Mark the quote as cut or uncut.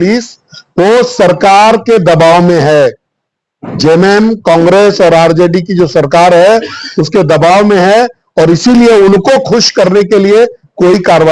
uncut